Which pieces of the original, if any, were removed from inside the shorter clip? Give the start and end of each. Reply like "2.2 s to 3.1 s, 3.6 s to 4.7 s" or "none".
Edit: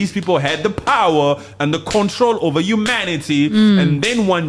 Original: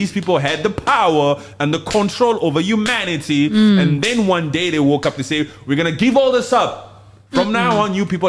none